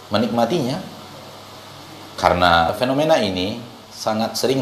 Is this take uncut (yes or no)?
no